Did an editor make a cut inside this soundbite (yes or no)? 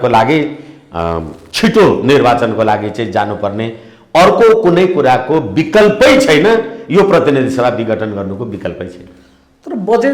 no